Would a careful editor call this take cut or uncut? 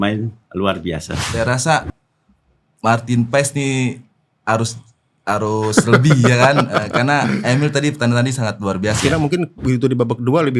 cut